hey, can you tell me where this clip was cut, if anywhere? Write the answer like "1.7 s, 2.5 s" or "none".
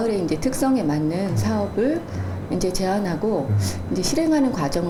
none